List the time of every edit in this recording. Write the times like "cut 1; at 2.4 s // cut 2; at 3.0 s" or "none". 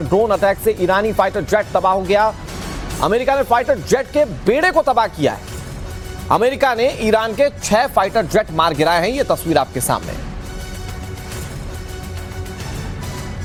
none